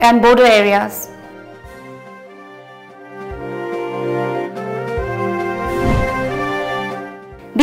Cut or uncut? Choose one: cut